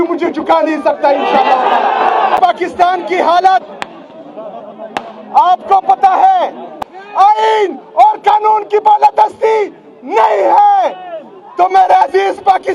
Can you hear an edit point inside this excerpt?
yes; 2 cuts; at 2.4 s, 6.7 s

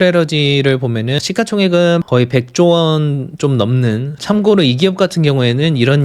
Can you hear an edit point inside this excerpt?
yes; 3 cuts; at 1.2 s, 2.1 s, 4.1 s

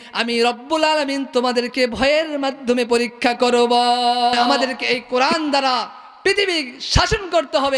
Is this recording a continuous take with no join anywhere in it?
no; 1 cut; at 4.6 s

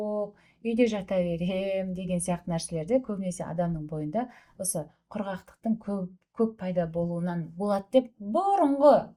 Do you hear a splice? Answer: no; 0 cuts

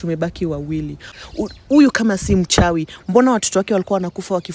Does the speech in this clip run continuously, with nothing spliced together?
no; 1 cut; at 1.1 s

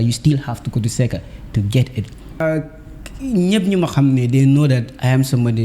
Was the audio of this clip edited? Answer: yes; 1 cut; at 2.4 s

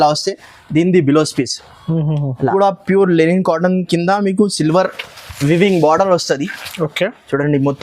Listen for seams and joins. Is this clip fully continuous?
no; 1 cut; at 2.5 s

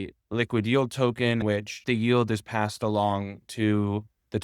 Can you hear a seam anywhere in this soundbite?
yes; 1 cut; at 1.6 s

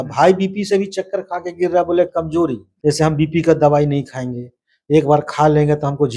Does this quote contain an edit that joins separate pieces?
yes; 1 cut; at 2.7 s

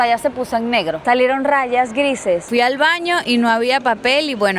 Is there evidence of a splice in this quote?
yes; 1 cut; at 2.4 s

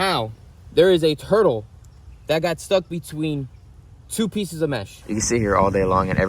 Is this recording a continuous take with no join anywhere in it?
no; 1 cut; at 4.9 s

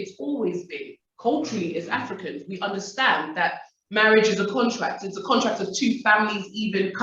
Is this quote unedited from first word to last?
yes; 0 cuts

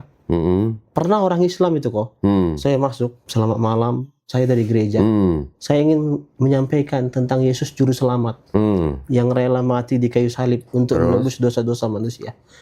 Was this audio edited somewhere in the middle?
yes; 1 cut; at 3.2 s

